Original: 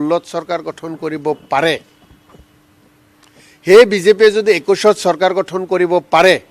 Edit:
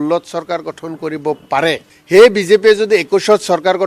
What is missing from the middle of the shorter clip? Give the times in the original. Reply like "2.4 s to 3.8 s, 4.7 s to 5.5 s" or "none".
1.9 s to 3.5 s